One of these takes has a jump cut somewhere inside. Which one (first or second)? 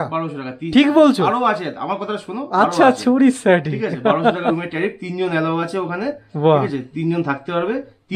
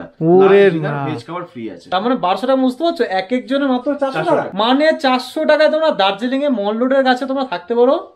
second